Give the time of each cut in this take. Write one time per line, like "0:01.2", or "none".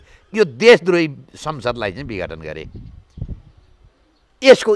none